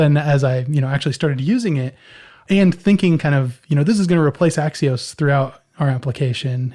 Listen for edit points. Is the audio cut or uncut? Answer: uncut